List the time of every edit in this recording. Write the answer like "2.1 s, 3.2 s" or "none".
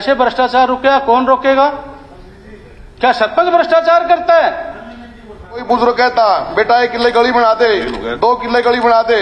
5.6 s

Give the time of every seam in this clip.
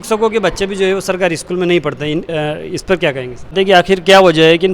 3.5 s

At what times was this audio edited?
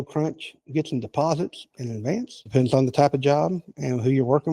2.4 s

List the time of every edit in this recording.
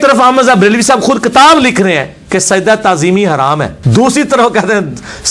3.8 s

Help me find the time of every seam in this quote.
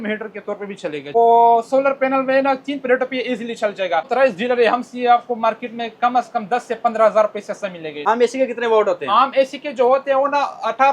1.1 s, 4.1 s, 8.0 s

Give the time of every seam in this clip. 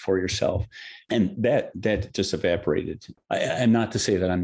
none

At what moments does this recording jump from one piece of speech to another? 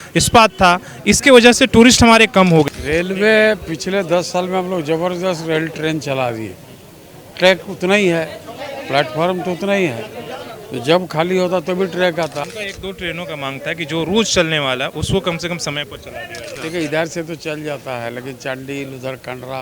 2.7 s, 12.4 s, 16.6 s

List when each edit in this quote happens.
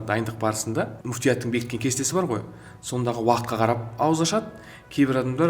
1.0 s

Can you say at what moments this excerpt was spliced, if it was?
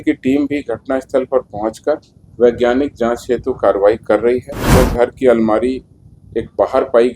4.6 s

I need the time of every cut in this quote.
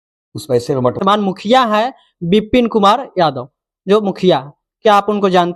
1.0 s

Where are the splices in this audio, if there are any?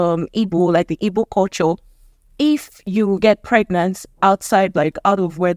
none

